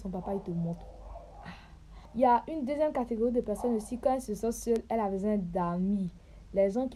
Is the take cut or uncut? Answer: uncut